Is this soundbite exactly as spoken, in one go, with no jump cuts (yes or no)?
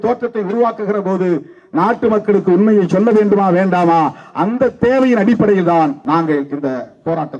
no